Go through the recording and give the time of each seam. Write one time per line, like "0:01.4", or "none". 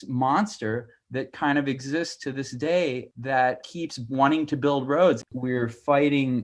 0:03.2
0:05.3